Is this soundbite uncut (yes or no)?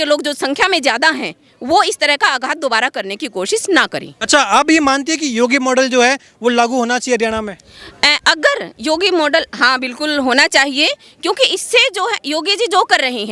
no